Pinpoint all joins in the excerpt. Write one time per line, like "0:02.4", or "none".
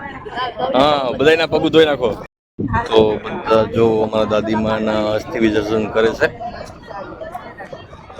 0:02.4